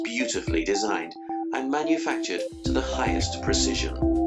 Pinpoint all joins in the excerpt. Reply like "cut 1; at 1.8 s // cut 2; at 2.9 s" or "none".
cut 1; at 3.1 s